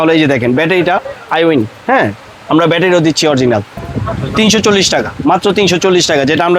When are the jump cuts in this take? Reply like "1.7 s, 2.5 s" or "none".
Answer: 3.8 s